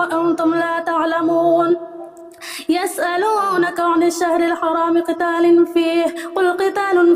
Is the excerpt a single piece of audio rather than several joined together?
yes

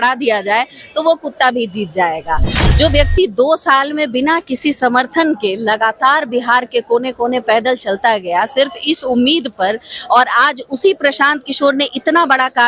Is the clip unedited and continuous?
no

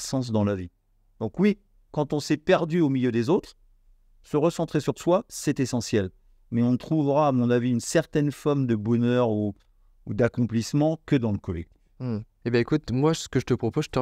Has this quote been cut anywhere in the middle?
no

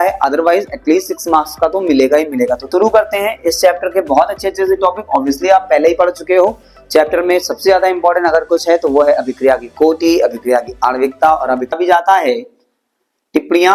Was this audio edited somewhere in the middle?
yes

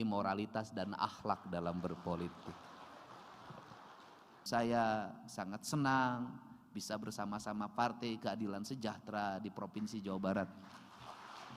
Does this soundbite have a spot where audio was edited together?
yes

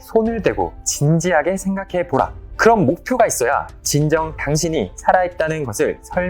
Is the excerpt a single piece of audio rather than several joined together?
no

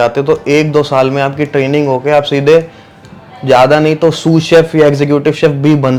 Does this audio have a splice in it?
no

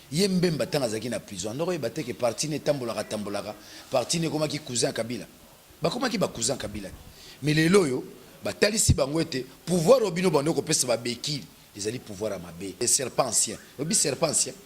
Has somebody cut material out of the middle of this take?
yes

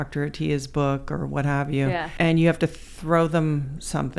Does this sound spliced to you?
yes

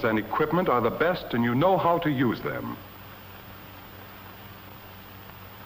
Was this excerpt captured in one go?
no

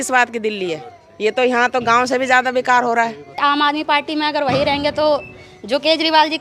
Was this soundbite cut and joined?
yes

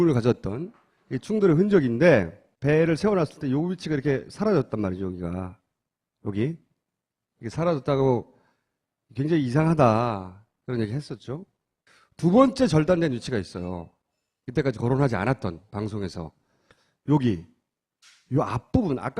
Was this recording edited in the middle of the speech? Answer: yes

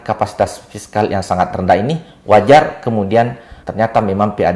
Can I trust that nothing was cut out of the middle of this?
no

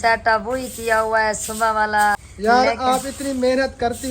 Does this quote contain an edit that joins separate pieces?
yes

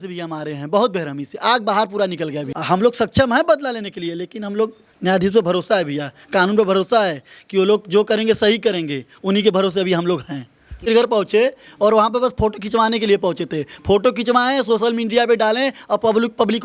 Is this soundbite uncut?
no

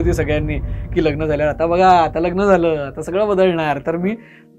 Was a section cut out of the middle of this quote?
no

